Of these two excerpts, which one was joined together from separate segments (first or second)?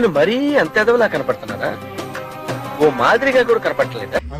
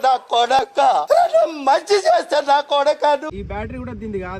second